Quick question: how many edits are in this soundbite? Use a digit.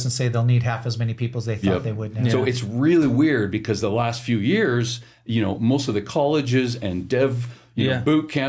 0